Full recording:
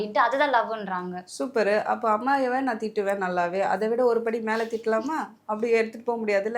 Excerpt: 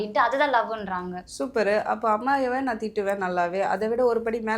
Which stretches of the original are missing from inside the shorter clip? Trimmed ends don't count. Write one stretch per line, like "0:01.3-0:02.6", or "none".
none